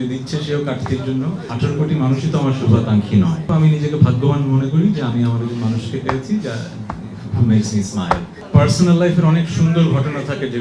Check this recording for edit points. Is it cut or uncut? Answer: cut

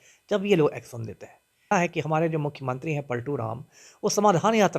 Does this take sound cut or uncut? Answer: cut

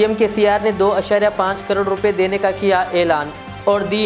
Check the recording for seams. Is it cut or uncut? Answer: uncut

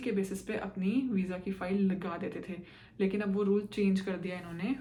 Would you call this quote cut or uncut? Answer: uncut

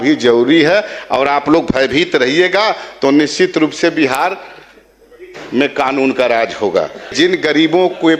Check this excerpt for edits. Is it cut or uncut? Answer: cut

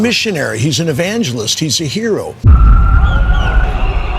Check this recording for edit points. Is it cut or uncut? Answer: cut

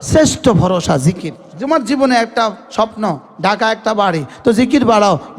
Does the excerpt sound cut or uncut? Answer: cut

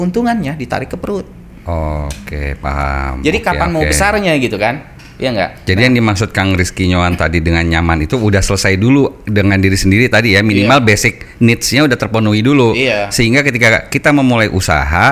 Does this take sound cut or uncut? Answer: uncut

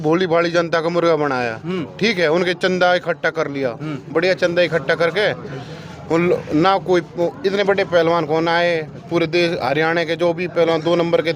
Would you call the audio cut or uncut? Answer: uncut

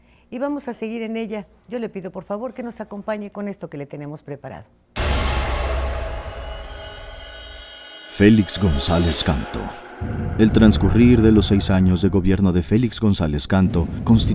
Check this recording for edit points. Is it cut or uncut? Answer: uncut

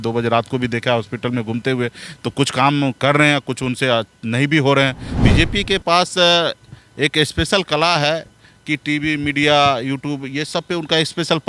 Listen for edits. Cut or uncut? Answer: cut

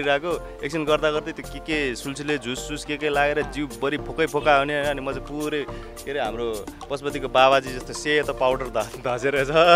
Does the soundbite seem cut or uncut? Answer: uncut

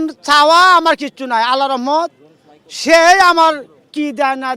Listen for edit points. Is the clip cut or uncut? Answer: uncut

